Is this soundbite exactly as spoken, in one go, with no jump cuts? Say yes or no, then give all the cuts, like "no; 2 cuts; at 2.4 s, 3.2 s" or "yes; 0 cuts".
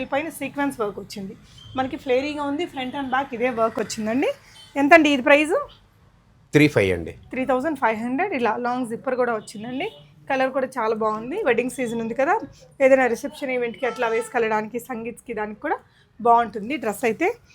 yes; 0 cuts